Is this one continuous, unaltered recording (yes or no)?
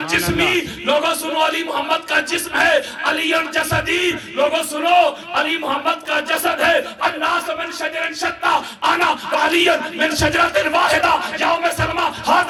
yes